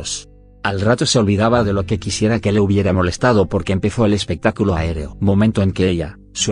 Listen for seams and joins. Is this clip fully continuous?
no; 1 cut; at 5.2 s

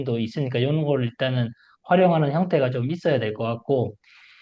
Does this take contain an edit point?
no; 0 cuts

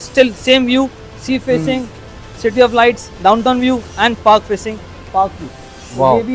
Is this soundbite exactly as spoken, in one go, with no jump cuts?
yes; 0 cuts

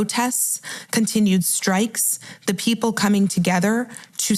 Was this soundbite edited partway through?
no; 0 cuts

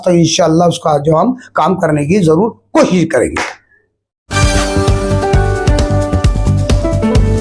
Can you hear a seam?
no; 0 cuts

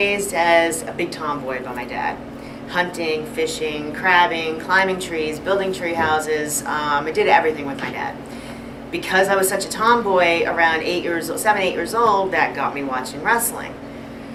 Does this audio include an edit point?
no; 0 cuts

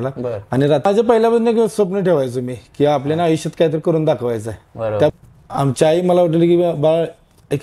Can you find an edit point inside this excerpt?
yes; 2 cuts; at 0.9 s, 5.1 s

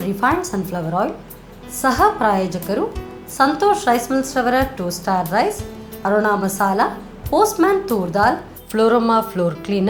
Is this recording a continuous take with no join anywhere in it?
yes; 0 cuts

